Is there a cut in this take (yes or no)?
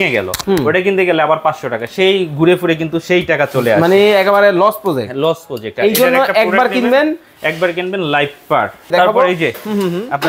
yes